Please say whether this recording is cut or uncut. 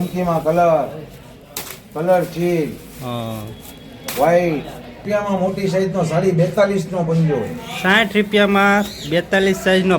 cut